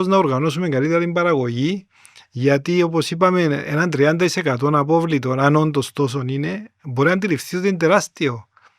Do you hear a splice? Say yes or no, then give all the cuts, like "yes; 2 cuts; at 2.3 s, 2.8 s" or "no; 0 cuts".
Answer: no; 0 cuts